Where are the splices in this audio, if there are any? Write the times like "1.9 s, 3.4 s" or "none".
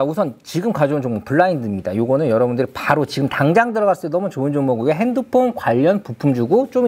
none